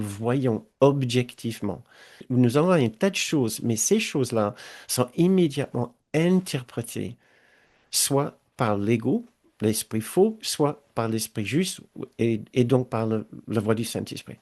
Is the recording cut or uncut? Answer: cut